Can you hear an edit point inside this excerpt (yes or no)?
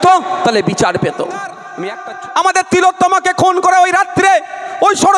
yes